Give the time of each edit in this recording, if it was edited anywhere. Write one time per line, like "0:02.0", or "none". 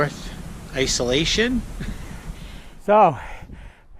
0:02.6